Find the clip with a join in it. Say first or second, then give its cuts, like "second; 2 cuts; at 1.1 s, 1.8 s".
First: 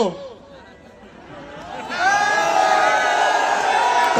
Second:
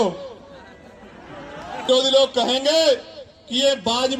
second; 1 cut; at 1.8 s